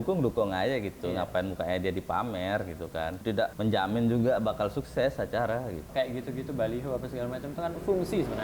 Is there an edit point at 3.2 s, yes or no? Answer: yes